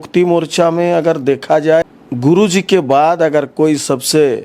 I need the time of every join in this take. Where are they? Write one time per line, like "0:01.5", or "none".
0:02.0